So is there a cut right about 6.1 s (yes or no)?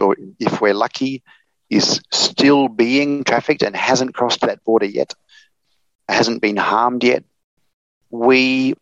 yes